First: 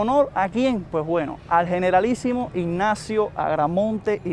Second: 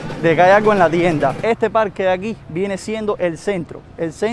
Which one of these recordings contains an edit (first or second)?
second